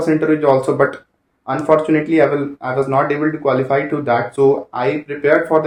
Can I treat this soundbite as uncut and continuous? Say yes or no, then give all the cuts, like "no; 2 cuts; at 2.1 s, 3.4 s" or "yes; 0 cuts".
yes; 0 cuts